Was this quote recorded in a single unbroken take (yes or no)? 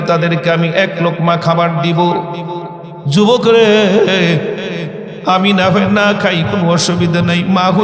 yes